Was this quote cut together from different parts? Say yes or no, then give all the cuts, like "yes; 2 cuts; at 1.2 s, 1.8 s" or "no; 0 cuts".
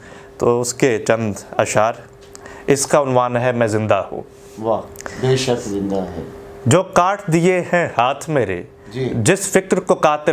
no; 0 cuts